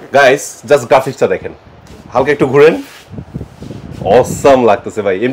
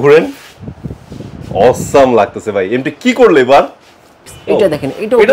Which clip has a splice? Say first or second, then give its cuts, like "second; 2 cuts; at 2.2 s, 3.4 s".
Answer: second; 1 cut; at 4.3 s